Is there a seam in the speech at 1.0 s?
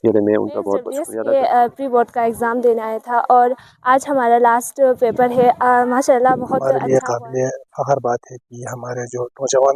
yes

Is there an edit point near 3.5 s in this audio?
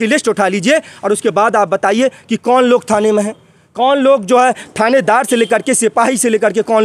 no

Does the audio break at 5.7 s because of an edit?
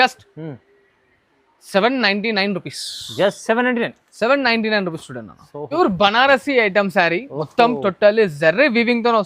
yes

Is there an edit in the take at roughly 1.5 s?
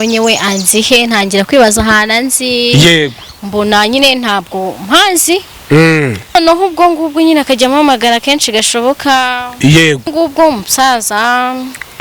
no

